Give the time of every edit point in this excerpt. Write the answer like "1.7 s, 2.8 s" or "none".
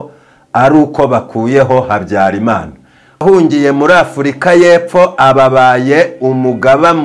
3.2 s